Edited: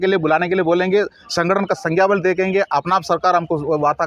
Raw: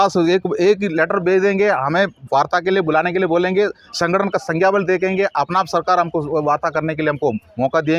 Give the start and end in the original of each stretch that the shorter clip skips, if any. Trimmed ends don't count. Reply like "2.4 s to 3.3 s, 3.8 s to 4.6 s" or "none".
none